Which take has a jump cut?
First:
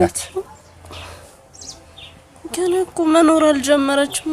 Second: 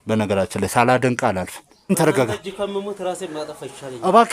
second; 1 cut; at 1.9 s

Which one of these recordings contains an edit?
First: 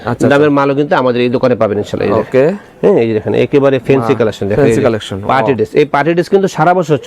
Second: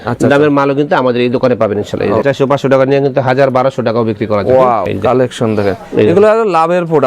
second; 2 cuts; at 2.2 s, 4.9 s

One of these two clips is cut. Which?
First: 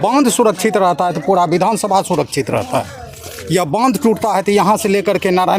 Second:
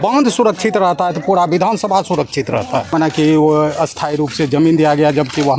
second; 1 cut; at 2.9 s

